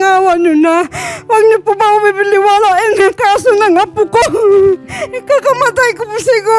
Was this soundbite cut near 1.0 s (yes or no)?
no